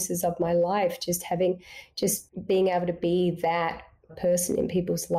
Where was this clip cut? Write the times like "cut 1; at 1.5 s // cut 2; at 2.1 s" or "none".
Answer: cut 1; at 2.3 s // cut 2; at 4.1 s